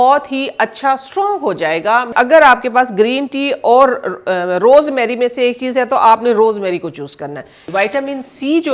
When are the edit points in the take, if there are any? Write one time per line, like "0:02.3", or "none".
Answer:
0:02.1
0:07.6